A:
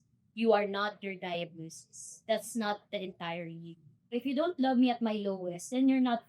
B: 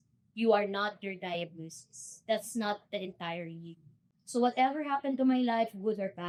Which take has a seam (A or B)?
A